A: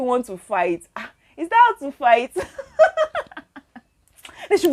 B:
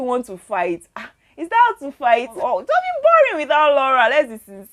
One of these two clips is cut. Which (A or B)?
B